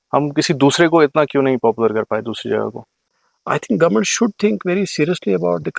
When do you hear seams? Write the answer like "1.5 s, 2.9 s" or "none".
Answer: 3.1 s